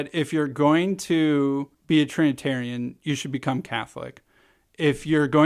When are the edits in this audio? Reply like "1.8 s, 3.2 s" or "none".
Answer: 1.7 s

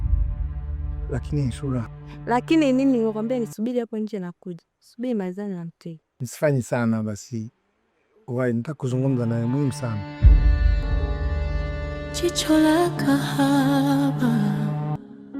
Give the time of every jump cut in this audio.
1.1 s, 9.9 s, 11.8 s

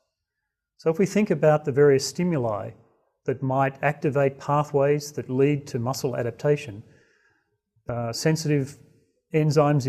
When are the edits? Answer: none

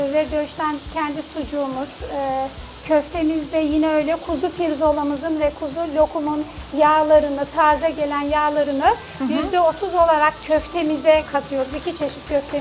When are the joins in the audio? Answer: none

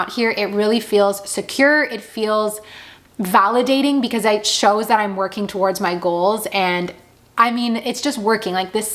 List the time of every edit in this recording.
none

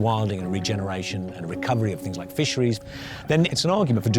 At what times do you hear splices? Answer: 3.2 s

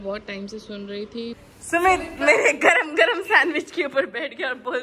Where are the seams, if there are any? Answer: 1.4 s

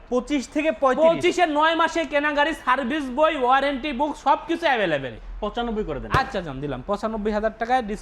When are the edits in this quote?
5.2 s

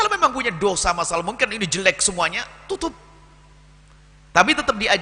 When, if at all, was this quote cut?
none

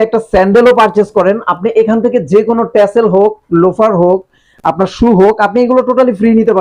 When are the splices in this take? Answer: none

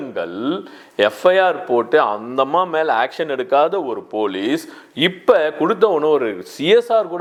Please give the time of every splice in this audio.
none

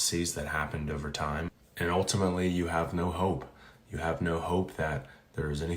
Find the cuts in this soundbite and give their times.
1.6 s

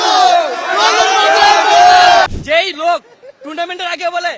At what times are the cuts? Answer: 2.3 s

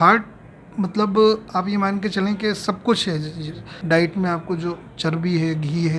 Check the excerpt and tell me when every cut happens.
3.8 s

